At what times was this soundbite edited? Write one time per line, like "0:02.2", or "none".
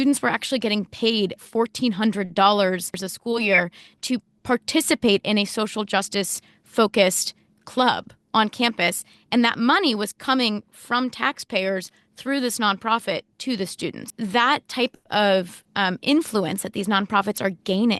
0:03.1
0:14.1